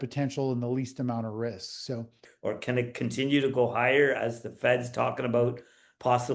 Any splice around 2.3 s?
yes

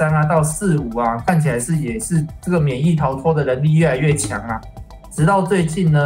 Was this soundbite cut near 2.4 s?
no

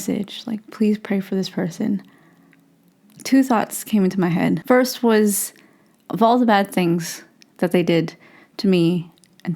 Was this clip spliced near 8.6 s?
no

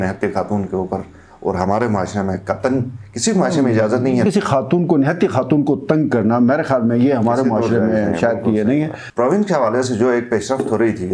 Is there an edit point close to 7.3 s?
no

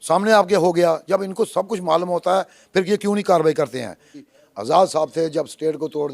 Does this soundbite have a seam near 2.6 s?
no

